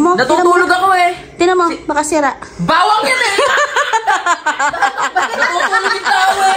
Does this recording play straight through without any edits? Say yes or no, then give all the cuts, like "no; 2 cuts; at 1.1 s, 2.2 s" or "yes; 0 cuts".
yes; 0 cuts